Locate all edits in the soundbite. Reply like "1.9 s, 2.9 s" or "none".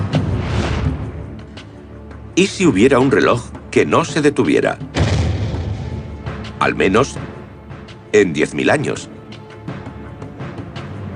none